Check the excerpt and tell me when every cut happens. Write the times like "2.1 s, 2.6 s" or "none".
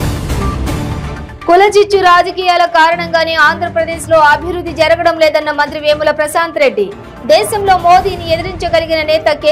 1.0 s